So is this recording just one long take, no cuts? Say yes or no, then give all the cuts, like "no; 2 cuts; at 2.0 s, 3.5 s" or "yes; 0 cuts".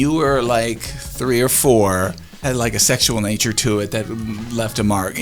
no; 1 cut; at 2.4 s